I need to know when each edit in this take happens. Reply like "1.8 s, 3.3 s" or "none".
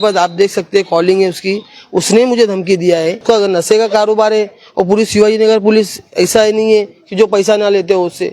3.2 s